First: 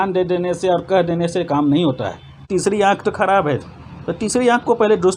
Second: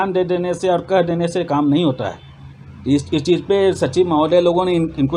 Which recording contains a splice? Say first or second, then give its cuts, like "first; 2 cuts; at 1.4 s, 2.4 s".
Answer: first; 1 cut; at 2.5 s